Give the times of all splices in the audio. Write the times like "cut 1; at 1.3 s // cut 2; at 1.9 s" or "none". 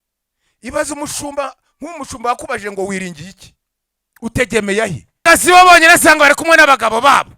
cut 1; at 5.2 s